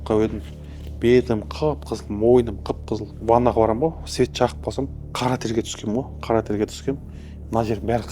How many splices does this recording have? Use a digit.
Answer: 2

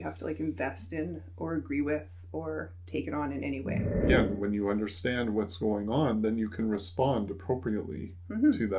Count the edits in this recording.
1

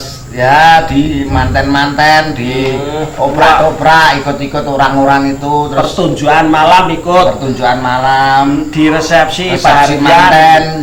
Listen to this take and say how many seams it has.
0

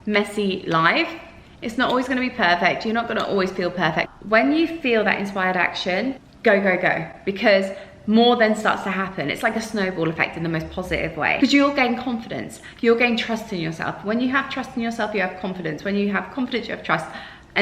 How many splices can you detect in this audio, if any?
3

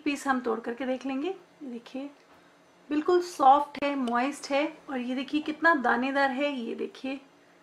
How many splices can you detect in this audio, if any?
1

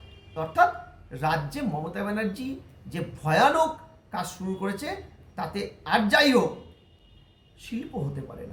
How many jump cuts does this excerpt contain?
0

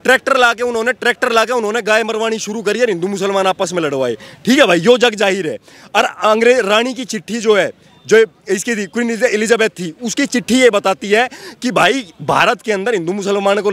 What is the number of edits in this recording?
0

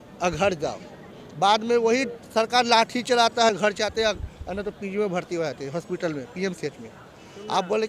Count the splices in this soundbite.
0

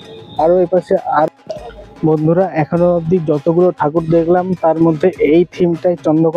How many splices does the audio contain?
1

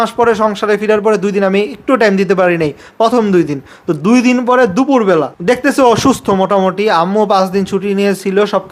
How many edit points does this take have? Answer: 0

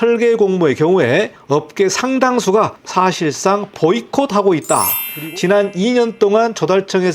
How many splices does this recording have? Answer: 3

